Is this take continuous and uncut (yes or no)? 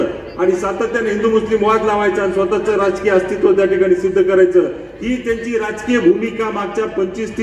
yes